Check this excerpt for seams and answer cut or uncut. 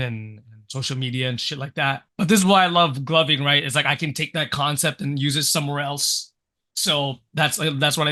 uncut